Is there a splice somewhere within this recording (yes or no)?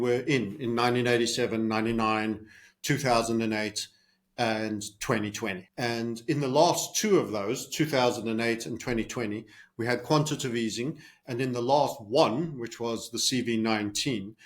yes